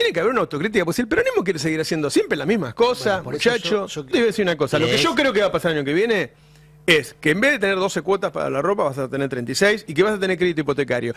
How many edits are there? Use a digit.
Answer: 1